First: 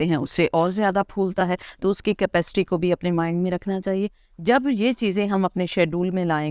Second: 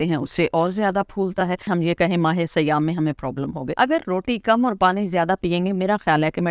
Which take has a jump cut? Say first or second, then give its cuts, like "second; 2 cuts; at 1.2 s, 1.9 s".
second; 2 cuts; at 1.7 s, 3.7 s